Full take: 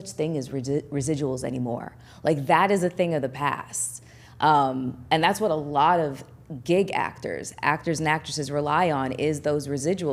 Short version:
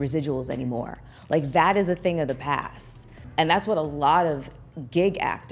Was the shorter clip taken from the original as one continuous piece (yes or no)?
no